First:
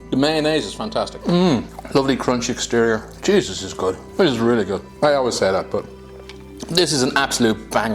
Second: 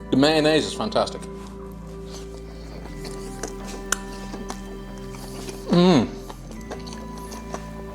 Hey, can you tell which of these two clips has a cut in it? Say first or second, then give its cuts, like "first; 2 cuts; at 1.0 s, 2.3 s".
first; 5 cuts; at 1.1 s, 1.8 s, 3.1 s, 4.0 s, 4.9 s